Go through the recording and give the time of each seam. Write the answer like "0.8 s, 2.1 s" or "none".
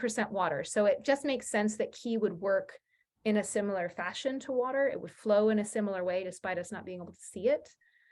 none